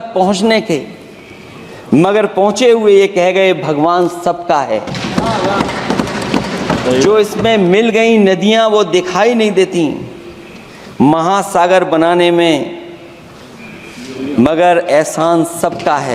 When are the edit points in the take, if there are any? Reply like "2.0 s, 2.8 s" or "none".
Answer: none